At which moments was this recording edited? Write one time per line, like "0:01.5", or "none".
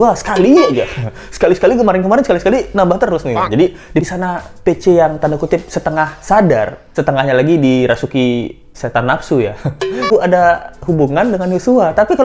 0:04.1
0:10.1